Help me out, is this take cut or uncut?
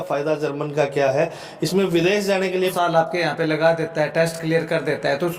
cut